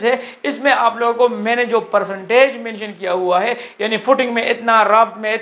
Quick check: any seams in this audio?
no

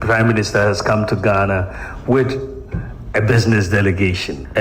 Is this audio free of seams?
yes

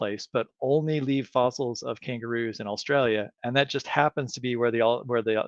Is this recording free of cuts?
yes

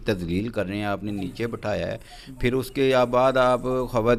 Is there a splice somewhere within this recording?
no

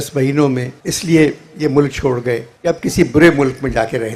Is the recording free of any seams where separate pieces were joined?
yes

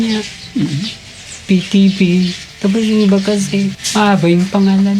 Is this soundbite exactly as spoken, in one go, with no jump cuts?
no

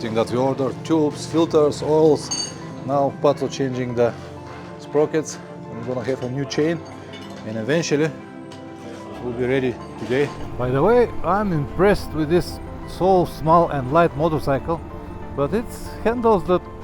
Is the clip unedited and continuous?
no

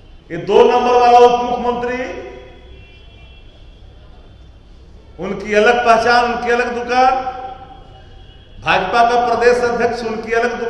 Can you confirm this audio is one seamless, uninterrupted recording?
yes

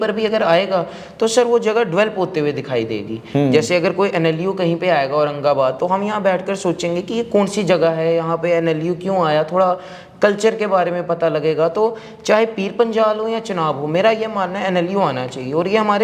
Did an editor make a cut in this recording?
no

